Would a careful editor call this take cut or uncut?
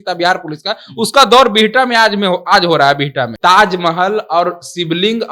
cut